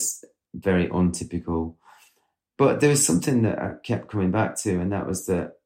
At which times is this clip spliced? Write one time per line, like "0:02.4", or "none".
none

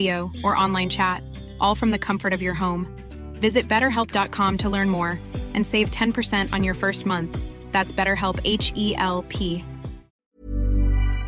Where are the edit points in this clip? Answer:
0:10.3

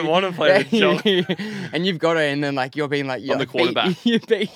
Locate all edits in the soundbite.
none

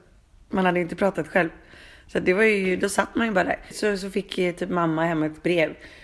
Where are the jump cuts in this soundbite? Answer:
0:03.7

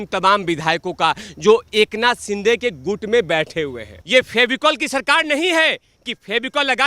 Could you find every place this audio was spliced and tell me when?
0:03.9

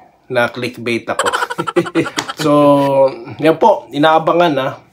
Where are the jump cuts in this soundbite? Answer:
0:02.3

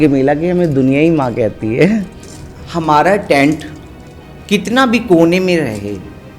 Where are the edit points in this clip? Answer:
0:02.3

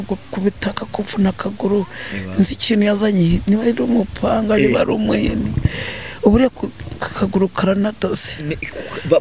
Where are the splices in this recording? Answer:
none

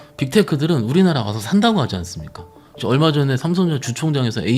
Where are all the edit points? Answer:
0:02.8

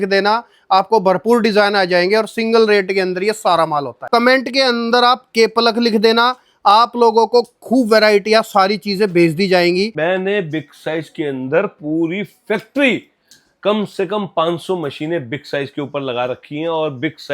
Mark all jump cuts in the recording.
0:04.0
0:09.9

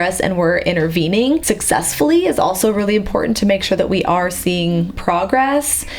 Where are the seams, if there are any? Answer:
0:04.9

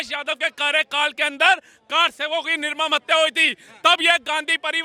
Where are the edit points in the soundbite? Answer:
none

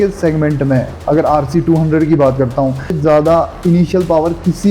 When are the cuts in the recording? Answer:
0:03.0

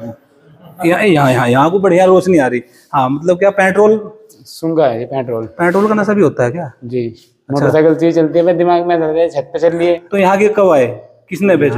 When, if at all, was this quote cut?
0:10.1

